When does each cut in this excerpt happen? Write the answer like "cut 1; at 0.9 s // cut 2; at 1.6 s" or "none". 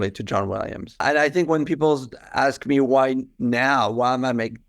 cut 1; at 1.0 s